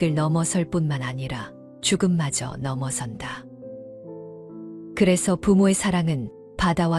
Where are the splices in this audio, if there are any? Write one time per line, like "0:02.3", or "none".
0:03.4
0:05.0